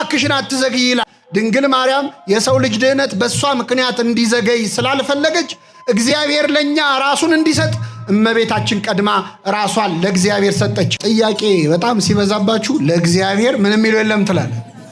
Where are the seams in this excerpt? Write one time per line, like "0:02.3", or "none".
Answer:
0:01.0
0:11.0